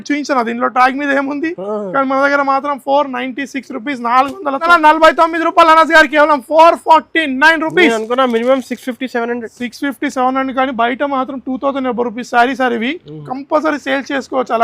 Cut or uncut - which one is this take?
cut